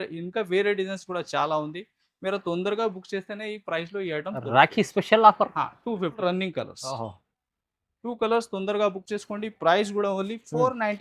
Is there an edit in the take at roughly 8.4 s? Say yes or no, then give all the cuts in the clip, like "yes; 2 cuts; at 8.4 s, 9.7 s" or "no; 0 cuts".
no; 1 cut; at 6.1 s